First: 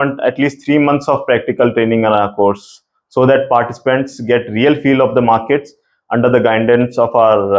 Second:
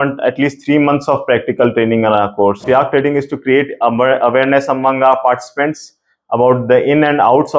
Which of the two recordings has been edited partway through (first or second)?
second